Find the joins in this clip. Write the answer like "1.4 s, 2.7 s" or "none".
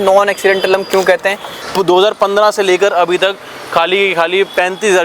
1.6 s